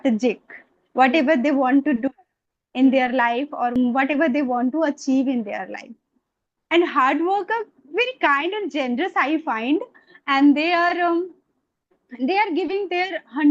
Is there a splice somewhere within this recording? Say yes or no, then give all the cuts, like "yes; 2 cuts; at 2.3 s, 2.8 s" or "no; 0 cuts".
yes; 1 cut; at 3.8 s